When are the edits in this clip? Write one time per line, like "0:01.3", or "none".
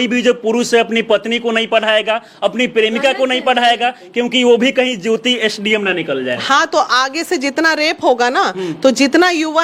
none

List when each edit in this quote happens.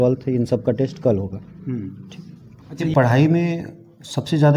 0:02.9

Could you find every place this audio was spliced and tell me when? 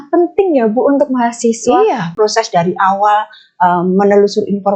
0:02.1

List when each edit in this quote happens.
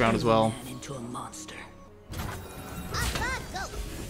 0:01.8

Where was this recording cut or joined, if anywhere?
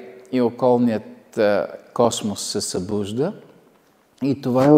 none

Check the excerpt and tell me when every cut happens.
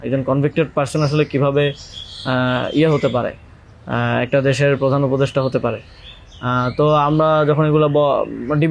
none

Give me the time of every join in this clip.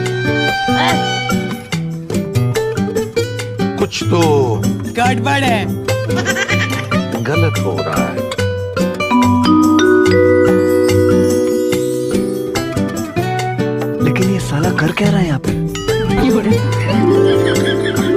none

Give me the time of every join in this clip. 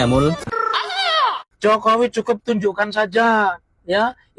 0:01.5

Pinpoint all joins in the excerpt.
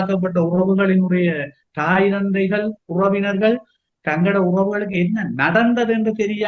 none

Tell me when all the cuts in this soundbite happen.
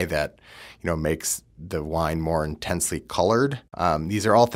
0:03.7

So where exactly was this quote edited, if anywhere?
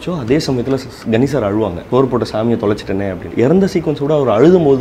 0:01.8
0:03.2

